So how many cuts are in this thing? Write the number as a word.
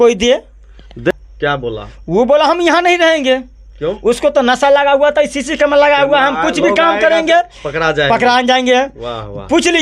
one